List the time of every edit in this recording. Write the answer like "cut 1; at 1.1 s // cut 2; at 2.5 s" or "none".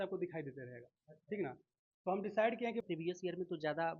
cut 1; at 2.8 s